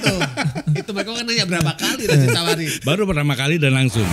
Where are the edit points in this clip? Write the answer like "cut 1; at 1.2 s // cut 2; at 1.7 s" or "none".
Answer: cut 1; at 2.7 s